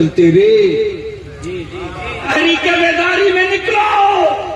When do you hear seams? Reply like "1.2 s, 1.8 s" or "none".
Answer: 2.3 s